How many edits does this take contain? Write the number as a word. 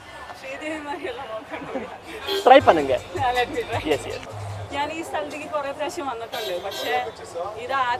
one